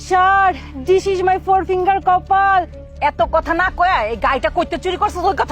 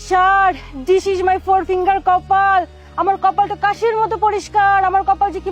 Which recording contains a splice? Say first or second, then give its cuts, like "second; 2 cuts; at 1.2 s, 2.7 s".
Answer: first; 1 cut; at 2.8 s